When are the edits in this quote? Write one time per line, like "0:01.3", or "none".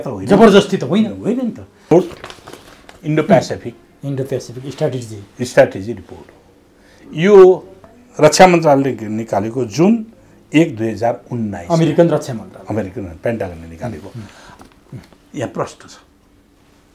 0:01.9
0:14.5